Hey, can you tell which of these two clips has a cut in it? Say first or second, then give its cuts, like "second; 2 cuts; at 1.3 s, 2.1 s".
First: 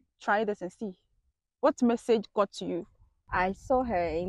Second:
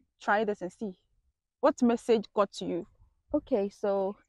first; 1 cut; at 3.1 s